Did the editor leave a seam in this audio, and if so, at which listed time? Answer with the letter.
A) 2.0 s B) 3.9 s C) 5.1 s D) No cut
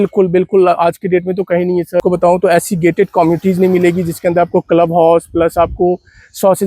A